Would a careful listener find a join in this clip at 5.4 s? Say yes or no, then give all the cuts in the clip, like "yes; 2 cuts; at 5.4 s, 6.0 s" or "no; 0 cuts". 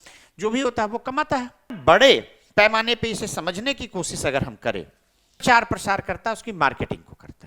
yes; 2 cuts; at 1.8 s, 5.4 s